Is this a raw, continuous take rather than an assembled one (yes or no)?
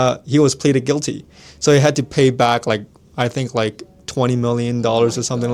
yes